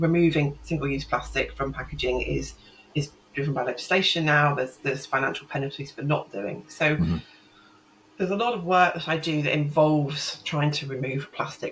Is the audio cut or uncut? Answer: uncut